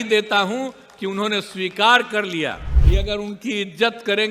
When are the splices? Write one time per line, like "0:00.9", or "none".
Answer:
0:02.7